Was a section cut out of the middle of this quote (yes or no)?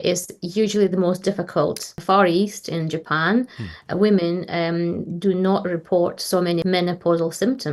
yes